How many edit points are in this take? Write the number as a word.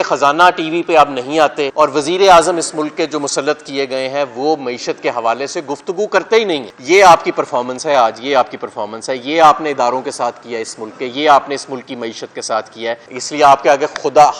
three